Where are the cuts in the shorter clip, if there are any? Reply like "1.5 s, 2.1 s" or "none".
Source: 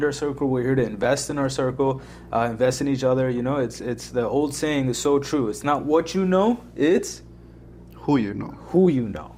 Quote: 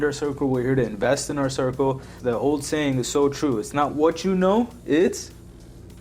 2.1 s